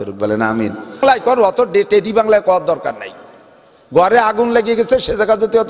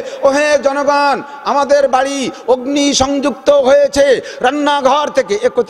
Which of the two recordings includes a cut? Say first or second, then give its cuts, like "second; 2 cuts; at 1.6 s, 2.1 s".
first; 1 cut; at 1.0 s